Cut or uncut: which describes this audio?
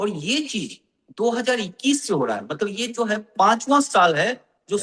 uncut